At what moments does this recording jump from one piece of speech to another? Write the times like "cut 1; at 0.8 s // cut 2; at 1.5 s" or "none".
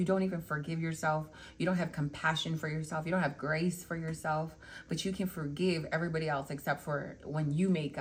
none